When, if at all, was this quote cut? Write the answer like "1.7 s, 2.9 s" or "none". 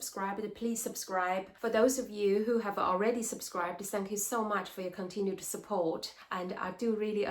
1.5 s, 6.2 s